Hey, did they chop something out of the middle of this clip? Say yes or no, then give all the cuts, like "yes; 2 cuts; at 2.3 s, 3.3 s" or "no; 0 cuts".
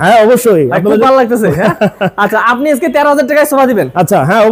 no; 0 cuts